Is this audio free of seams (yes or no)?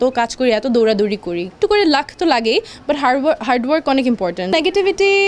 no